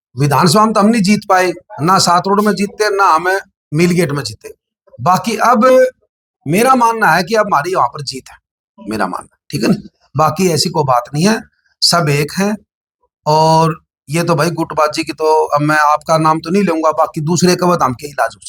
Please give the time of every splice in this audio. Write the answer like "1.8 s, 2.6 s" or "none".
none